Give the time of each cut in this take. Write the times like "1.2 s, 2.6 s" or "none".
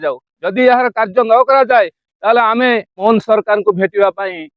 3.0 s